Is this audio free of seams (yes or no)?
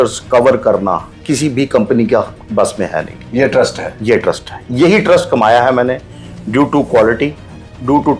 yes